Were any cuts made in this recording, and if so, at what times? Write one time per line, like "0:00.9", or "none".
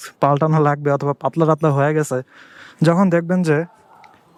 none